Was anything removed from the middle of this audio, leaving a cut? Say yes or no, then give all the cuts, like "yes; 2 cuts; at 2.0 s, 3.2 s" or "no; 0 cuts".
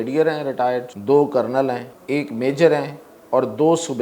yes; 2 cuts; at 0.9 s, 1.9 s